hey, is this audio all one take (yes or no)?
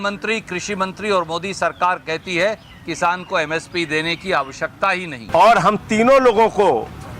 no